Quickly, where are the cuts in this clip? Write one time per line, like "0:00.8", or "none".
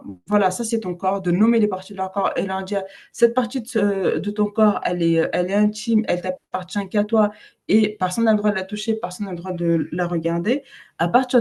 none